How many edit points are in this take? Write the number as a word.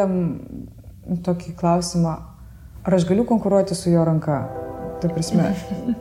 zero